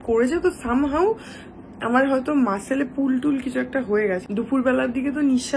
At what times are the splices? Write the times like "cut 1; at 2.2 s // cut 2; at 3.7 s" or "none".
cut 1; at 4.2 s